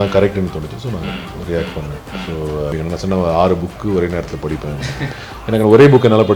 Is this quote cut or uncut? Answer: cut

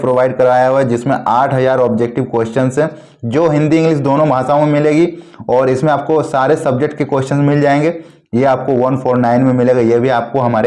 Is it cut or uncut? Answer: uncut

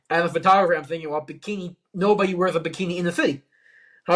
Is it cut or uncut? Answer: uncut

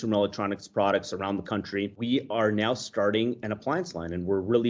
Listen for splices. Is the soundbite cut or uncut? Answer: cut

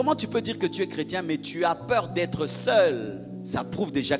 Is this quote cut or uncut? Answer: cut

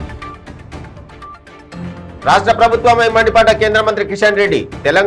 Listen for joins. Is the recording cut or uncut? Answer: uncut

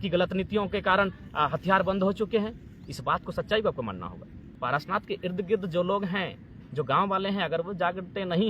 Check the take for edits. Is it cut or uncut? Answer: cut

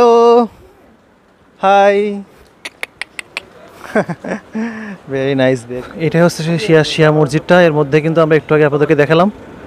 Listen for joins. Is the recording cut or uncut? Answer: cut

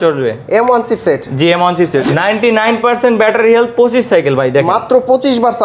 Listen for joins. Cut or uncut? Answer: cut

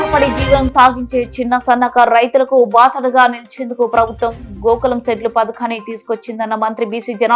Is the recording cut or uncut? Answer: uncut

